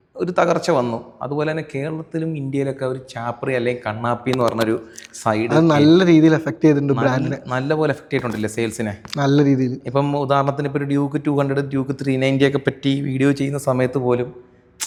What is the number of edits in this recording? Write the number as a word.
zero